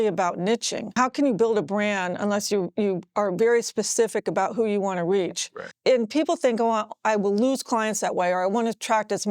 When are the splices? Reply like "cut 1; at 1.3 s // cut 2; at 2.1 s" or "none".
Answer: cut 1; at 0.9 s // cut 2; at 5.7 s